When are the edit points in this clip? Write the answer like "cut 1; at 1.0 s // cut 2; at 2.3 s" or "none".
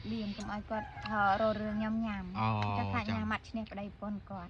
none